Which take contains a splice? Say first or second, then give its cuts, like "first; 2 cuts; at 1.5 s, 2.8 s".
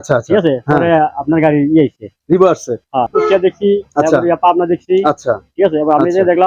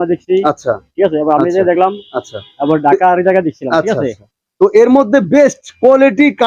first; 1 cut; at 3.1 s